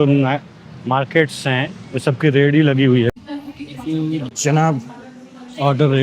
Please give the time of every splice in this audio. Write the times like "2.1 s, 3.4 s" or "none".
3.1 s